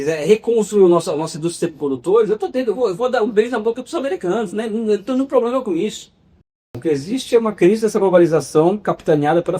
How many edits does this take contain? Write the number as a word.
one